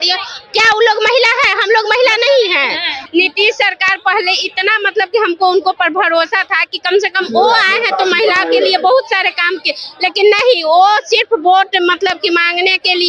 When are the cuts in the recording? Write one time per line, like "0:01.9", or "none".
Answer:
0:02.9